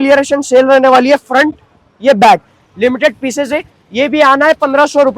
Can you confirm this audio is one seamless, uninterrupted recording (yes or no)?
yes